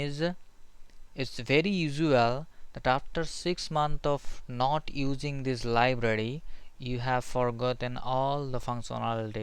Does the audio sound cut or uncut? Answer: uncut